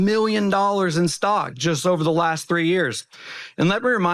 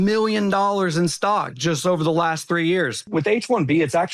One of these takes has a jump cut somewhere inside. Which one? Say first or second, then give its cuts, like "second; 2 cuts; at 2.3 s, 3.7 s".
second; 1 cut; at 3.0 s